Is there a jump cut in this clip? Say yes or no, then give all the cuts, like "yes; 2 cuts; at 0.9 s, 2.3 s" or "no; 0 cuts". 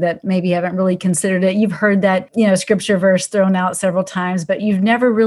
yes; 1 cut; at 2.3 s